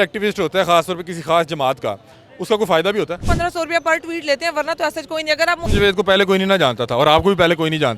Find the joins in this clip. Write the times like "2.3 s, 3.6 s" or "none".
3.2 s, 5.7 s